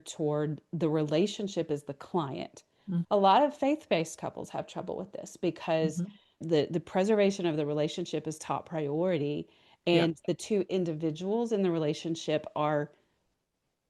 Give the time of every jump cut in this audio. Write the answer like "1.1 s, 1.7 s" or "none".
3.0 s, 6.4 s